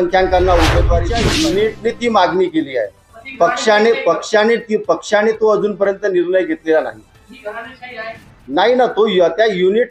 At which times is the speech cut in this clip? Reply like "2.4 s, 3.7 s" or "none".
1.1 s